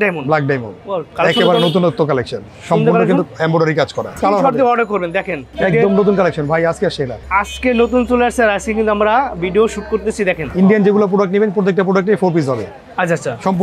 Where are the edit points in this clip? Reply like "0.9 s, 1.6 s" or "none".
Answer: 4.2 s, 5.4 s, 7.2 s, 10.5 s